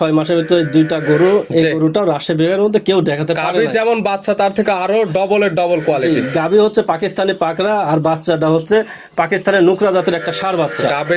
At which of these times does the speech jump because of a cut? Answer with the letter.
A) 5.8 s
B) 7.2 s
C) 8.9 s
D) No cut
D